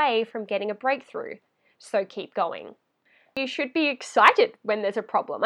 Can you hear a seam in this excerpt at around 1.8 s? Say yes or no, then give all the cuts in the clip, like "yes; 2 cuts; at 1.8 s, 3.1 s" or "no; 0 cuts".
no; 1 cut; at 3.4 s